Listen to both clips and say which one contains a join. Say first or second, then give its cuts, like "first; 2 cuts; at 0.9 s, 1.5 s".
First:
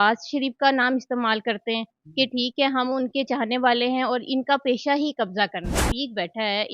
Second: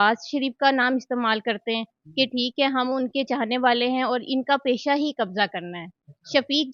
first; 1 cut; at 5.9 s